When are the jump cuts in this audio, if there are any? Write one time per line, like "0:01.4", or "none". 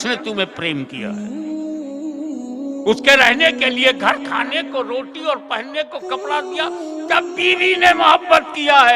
0:01.0
0:02.8